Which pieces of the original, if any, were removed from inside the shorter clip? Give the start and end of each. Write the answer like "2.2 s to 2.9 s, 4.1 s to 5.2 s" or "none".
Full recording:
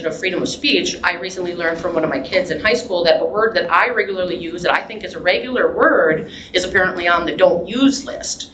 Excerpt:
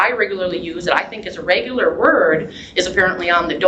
none